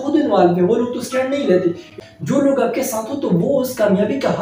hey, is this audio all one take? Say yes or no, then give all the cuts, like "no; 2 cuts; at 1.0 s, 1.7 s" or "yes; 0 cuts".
no; 1 cut; at 1.9 s